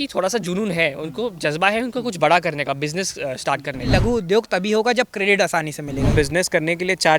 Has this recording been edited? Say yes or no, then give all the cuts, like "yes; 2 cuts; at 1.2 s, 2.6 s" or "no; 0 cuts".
yes; 2 cuts; at 3.9 s, 6.1 s